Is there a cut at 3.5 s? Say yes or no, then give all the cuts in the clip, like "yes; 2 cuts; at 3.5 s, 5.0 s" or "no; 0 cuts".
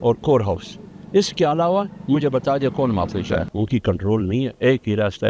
yes; 1 cut; at 3.5 s